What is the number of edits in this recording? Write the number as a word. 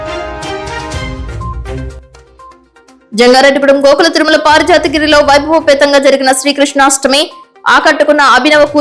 two